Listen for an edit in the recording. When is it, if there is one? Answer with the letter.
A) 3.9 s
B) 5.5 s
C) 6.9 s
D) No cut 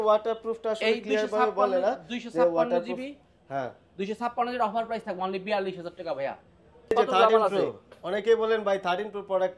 C